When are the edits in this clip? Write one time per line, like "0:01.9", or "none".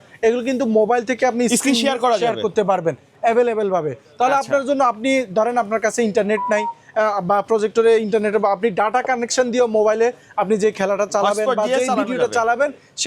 none